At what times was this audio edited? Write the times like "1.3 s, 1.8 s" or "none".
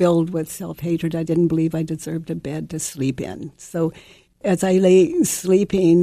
4.4 s